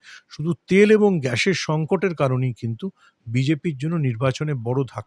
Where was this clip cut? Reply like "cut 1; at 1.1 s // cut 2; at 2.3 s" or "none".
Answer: none